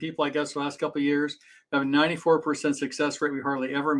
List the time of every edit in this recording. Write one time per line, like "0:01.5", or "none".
none